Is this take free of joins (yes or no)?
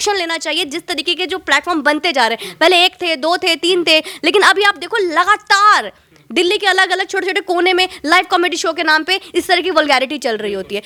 yes